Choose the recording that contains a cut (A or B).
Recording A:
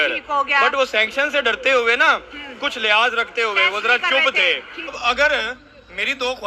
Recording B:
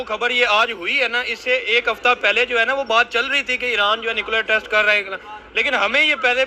A